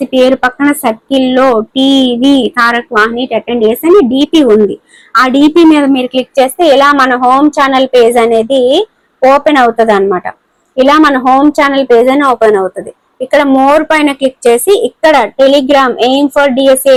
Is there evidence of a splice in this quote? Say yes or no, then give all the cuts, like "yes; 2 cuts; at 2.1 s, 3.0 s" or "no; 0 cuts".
no; 0 cuts